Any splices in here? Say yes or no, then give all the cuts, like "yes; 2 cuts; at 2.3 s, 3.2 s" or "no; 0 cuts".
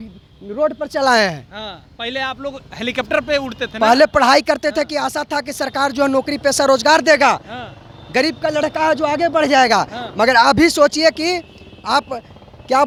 no; 0 cuts